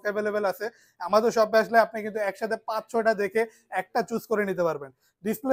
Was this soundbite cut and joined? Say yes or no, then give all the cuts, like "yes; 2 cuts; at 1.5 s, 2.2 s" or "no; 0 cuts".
no; 0 cuts